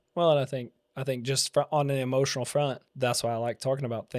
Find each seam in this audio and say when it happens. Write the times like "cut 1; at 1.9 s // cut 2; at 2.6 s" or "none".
cut 1; at 2.9 s